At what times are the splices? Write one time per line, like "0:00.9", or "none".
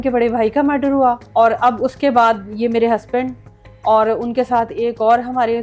0:01.2